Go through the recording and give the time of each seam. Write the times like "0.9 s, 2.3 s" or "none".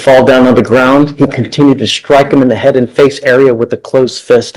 none